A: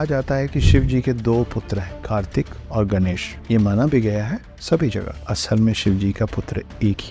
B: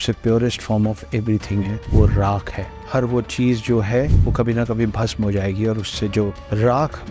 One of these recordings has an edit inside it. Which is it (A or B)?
A